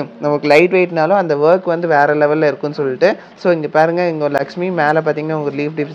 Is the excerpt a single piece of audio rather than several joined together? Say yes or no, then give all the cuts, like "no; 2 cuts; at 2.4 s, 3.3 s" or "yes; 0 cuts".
yes; 0 cuts